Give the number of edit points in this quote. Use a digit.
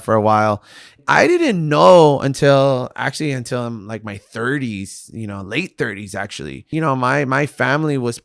2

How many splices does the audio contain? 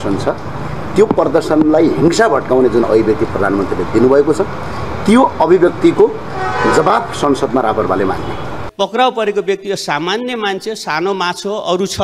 1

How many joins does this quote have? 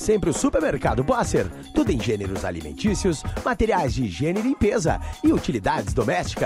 0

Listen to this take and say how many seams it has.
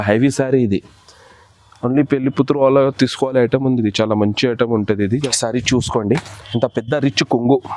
1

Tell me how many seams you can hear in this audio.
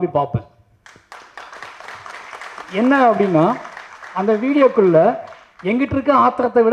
0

